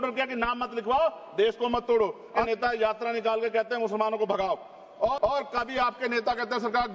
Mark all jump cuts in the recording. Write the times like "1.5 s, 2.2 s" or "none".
2.5 s, 5.2 s